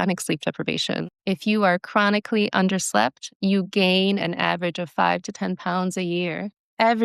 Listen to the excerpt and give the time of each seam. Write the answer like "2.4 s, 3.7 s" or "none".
1.0 s